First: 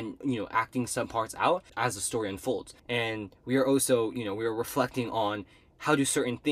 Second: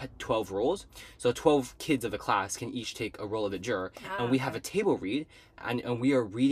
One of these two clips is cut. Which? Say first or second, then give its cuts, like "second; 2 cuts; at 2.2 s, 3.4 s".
first; 2 cuts; at 1.7 s, 2.7 s